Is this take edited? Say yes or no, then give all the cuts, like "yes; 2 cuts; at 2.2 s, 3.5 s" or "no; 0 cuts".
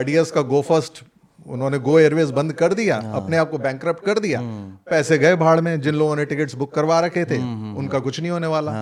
no; 0 cuts